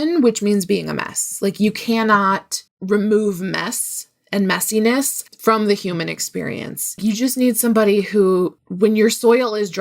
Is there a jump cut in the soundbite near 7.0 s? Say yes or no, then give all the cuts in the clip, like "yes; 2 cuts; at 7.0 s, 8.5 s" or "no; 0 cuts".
yes; 2 cuts; at 7.0 s, 8.6 s